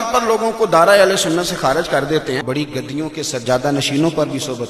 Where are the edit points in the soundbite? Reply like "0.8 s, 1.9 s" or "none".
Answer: 2.4 s